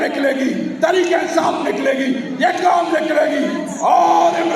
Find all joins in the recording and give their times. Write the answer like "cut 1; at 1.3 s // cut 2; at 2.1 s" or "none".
none